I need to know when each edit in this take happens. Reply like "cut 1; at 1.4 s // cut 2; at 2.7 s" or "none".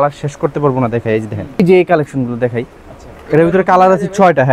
cut 1; at 1.6 s